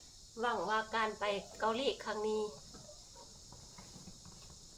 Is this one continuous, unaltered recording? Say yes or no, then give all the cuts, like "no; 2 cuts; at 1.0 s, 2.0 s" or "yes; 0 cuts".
yes; 0 cuts